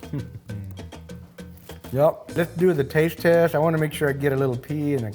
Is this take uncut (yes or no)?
no